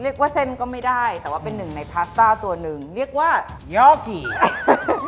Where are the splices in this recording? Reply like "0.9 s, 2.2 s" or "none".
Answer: 3.6 s